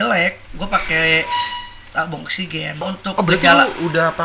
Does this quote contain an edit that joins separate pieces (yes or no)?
yes